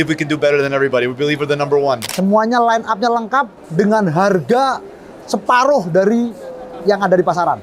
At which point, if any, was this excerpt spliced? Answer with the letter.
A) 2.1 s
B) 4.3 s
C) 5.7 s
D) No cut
A